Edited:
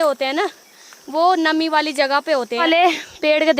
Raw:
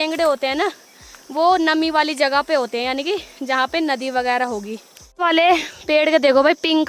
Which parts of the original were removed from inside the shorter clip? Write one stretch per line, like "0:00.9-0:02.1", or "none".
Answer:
0:02.8-0:05.2